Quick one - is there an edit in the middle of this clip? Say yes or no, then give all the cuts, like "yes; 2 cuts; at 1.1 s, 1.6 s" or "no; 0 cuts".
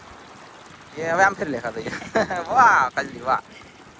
no; 0 cuts